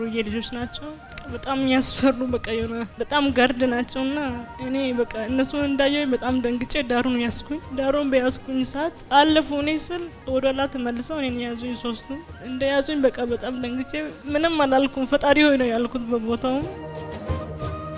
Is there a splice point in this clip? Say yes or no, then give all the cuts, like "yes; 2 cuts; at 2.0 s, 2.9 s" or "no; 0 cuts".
no; 0 cuts